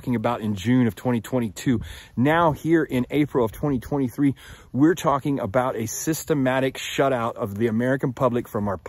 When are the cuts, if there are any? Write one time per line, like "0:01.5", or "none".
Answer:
0:07.3